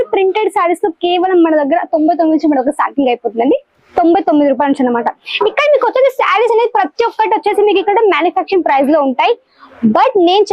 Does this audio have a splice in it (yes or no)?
no